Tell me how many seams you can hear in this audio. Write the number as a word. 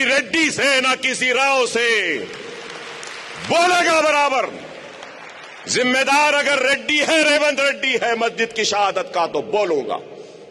zero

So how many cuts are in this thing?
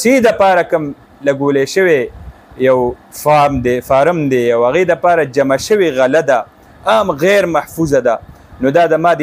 zero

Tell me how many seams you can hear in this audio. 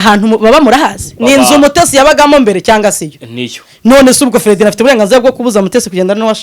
one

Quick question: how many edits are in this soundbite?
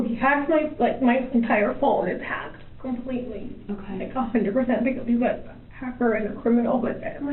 zero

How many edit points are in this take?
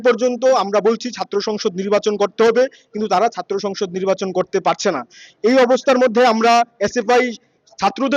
zero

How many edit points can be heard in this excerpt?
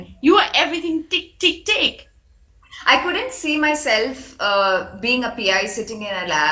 one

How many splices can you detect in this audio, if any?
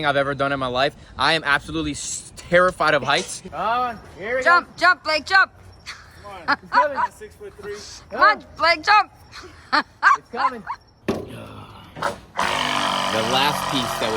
two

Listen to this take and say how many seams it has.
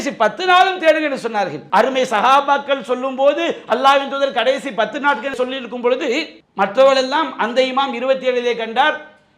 one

